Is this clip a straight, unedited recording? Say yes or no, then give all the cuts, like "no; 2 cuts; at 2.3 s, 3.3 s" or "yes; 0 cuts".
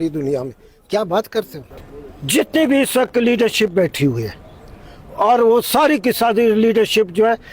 no; 1 cut; at 1.6 s